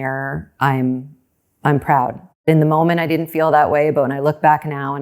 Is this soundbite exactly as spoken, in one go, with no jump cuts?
no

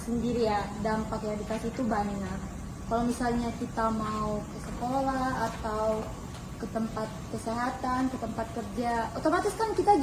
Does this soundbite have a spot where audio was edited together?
no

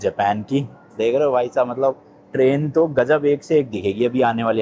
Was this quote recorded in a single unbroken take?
yes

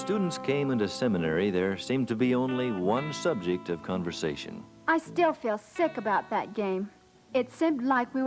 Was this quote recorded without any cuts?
yes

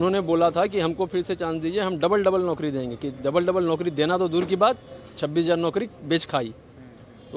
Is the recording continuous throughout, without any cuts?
yes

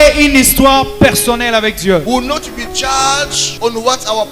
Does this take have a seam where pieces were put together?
yes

